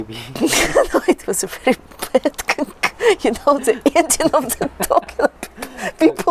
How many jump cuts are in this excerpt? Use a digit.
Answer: 0